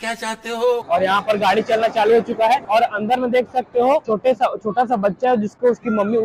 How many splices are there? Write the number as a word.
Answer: three